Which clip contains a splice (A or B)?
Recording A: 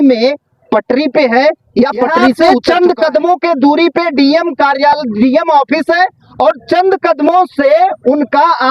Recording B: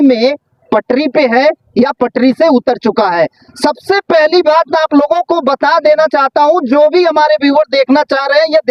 A